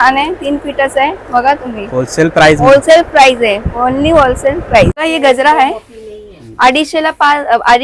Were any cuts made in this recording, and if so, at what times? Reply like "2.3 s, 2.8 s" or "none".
5.0 s